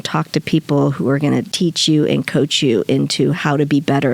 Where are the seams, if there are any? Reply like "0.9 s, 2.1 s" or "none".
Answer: 1.5 s